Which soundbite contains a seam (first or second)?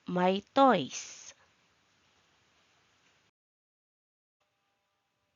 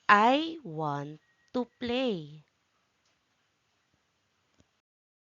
second